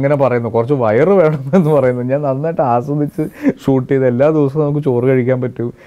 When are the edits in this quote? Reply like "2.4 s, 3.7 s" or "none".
none

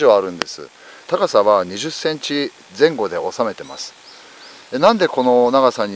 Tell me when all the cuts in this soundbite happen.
1.1 s

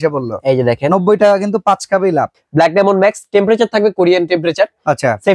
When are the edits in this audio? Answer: 2.4 s

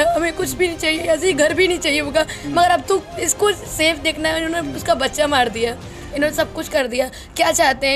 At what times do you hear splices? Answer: none

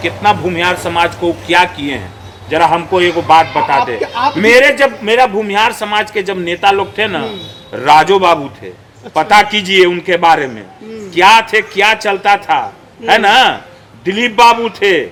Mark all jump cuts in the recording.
none

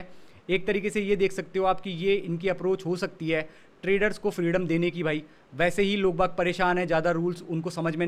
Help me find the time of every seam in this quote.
none

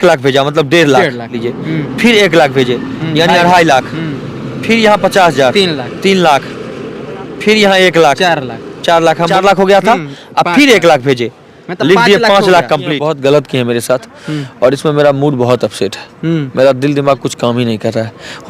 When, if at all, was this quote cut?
1.5 s, 9.3 s, 13.0 s

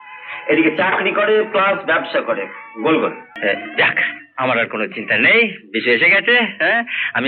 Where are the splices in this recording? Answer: 3.3 s

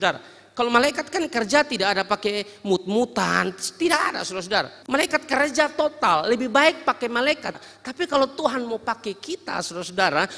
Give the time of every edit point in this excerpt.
4.8 s, 7.6 s

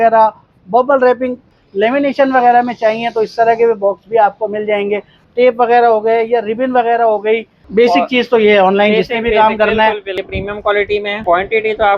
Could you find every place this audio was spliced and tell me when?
1.5 s, 5.2 s, 7.6 s, 10.1 s, 11.2 s

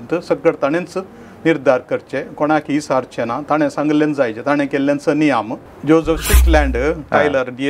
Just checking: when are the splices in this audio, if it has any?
5.6 s

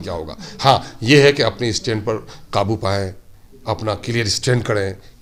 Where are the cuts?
none

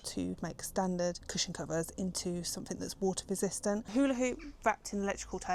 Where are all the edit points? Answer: 3.9 s

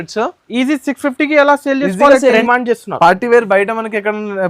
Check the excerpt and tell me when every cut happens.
2.4 s

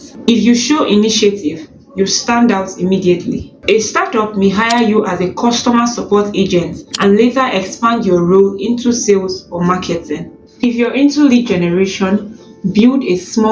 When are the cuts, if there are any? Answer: 10.3 s

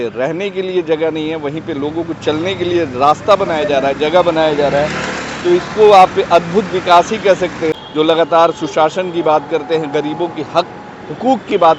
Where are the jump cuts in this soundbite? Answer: 7.8 s

